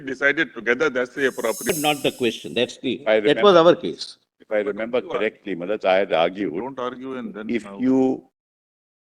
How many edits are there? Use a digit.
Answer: 1